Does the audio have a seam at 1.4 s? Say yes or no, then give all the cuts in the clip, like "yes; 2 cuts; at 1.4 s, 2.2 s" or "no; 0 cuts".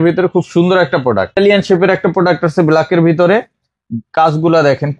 yes; 1 cut; at 1.4 s